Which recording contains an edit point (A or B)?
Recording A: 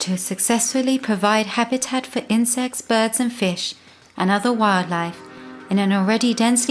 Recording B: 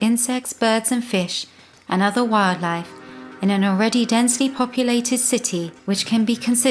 B